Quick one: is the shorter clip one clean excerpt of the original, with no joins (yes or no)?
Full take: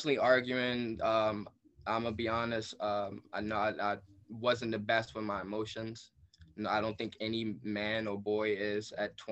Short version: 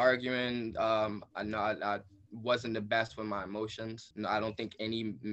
no